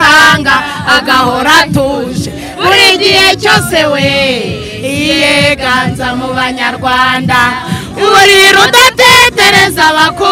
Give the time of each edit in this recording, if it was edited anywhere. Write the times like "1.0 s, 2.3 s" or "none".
none